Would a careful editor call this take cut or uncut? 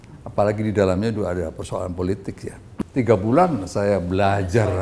cut